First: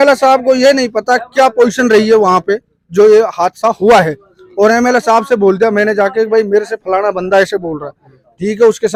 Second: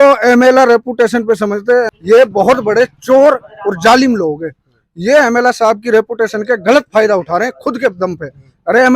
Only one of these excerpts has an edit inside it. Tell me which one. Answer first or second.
second